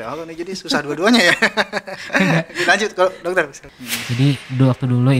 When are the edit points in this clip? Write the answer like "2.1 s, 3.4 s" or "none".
3.7 s